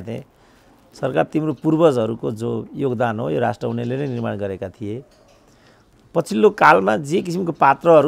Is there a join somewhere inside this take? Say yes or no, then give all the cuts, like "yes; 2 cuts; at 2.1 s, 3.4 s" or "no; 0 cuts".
no; 0 cuts